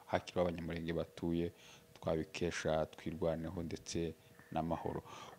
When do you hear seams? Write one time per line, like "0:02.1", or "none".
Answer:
none

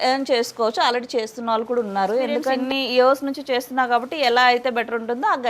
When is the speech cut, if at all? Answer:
0:02.6

